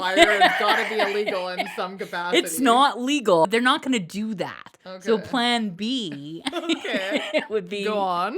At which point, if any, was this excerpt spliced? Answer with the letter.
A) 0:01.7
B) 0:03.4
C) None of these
B